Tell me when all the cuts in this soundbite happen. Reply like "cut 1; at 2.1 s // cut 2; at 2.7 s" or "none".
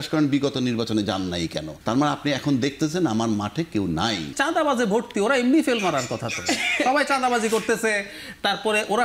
cut 1; at 1.7 s // cut 2; at 4.4 s